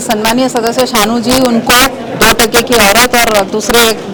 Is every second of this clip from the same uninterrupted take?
yes; 0 cuts

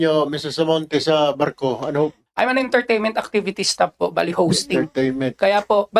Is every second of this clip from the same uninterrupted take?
no; 1 cut; at 2.2 s

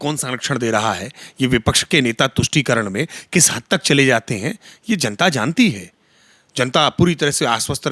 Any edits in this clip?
no; 0 cuts

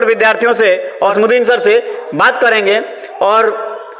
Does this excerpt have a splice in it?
no; 0 cuts

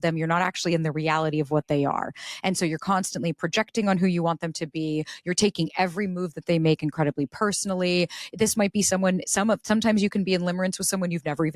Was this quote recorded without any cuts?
yes; 0 cuts

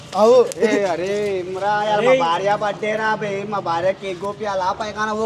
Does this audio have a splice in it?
no; 0 cuts

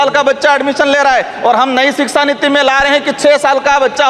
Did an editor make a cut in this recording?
no; 0 cuts

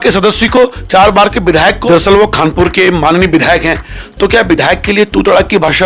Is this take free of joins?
no; 1 cut; at 1.8 s

